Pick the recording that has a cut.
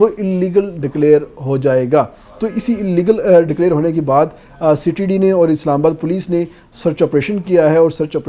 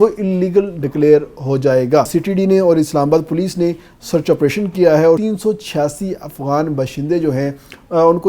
second; 2 cuts; at 2.1 s, 5.2 s

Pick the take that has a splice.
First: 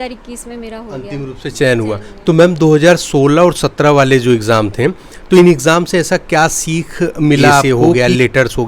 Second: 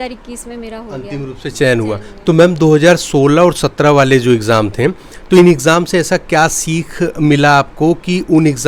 first; 1 cut; at 7.8 s

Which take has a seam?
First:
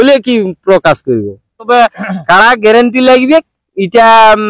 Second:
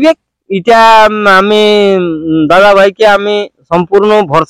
first; 1 cut; at 1.7 s

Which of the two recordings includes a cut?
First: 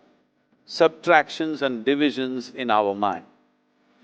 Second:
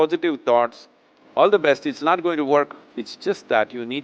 second; 1 cut; at 2.8 s

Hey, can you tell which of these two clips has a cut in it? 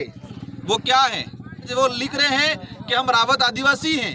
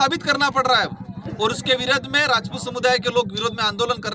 first; 1 cut; at 1.7 s

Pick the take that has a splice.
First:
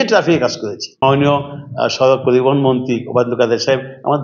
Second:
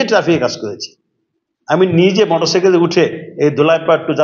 first; 1 cut; at 1.0 s

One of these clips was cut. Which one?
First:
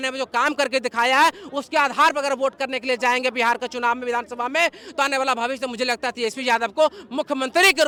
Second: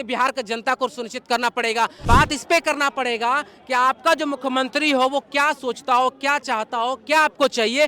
second; 1 cut; at 2.0 s

